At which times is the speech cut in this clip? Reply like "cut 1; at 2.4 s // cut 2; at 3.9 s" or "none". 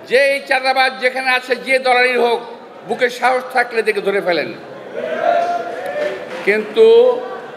none